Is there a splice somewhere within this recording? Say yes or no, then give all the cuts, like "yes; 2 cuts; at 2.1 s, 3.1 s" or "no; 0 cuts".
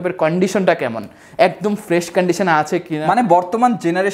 yes; 1 cut; at 3.0 s